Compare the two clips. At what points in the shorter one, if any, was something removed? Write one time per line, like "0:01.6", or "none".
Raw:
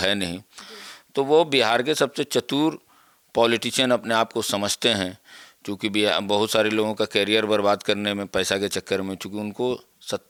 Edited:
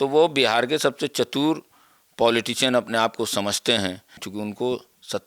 0:04.2